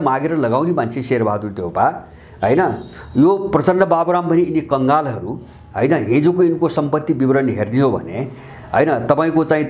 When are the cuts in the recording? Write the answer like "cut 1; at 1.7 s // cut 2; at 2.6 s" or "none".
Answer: none